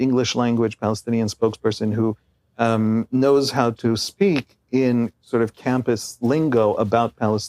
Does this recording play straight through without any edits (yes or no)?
yes